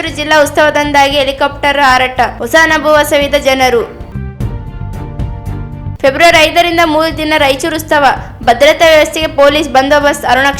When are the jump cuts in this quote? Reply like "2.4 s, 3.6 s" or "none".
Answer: none